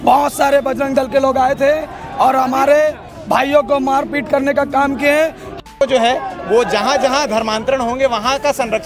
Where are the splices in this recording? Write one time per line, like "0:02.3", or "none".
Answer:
0:05.6